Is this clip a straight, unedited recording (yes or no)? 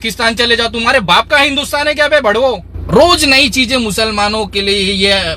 no